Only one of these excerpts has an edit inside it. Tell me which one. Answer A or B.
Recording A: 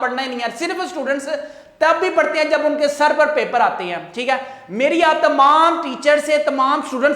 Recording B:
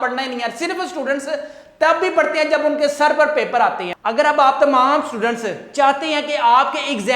B